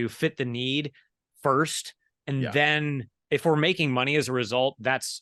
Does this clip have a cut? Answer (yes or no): no